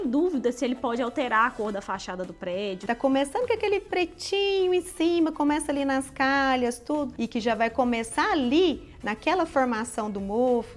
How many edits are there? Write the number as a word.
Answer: two